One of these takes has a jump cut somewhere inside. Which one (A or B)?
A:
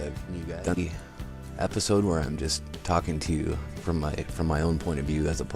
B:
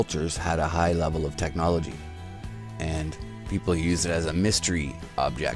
A